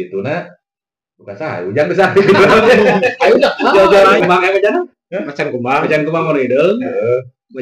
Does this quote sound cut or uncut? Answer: cut